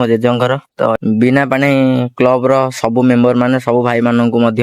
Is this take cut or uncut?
cut